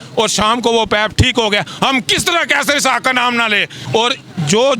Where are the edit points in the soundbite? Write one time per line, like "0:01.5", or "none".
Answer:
0:03.8

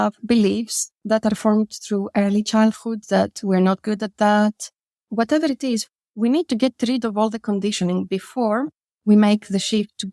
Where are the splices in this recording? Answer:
0:04.9
0:05.8

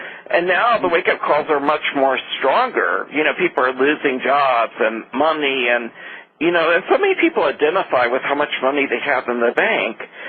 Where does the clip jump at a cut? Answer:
0:02.4

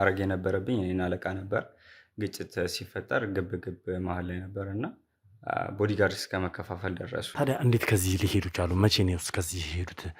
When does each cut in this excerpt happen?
0:07.3

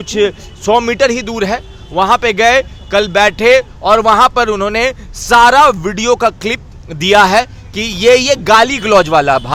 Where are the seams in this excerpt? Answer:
none

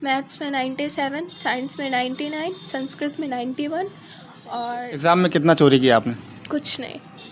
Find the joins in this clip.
0:04.7

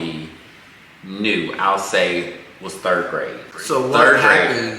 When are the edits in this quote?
0:03.5

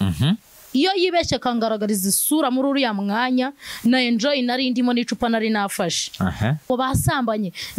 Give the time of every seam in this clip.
0:06.7

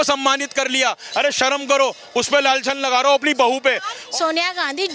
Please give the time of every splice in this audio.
0:03.9

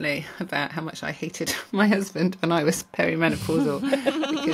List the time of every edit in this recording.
none

